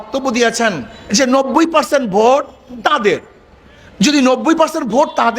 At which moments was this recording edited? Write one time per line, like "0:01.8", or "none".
0:00.9